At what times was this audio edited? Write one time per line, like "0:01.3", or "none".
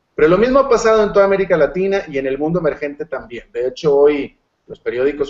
none